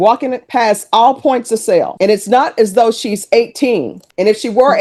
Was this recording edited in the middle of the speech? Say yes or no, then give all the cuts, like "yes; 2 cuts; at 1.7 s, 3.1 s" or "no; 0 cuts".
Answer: no; 0 cuts